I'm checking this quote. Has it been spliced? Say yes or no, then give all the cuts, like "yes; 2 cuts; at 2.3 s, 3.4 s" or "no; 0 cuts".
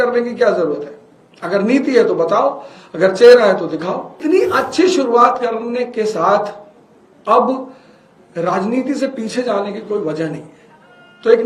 yes; 1 cut; at 4.2 s